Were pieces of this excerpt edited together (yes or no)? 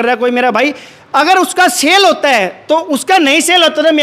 no